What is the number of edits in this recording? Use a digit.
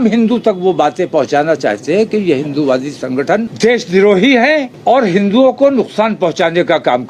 2